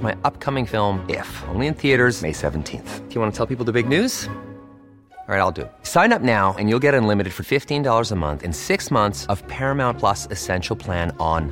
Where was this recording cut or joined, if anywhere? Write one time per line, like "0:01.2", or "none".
none